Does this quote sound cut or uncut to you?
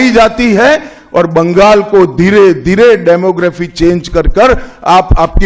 uncut